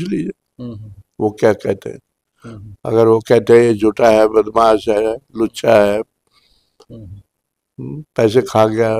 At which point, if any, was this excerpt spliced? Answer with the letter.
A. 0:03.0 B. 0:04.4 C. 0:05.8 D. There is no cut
D